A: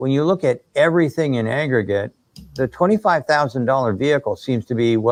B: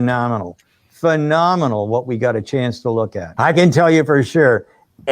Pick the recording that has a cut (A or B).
B